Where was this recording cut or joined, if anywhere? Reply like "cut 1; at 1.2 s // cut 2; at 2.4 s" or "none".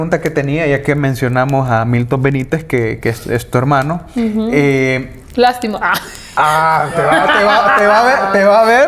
none